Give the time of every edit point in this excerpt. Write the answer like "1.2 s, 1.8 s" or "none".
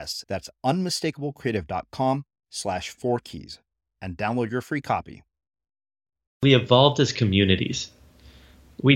6.4 s